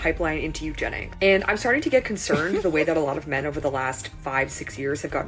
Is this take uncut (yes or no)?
yes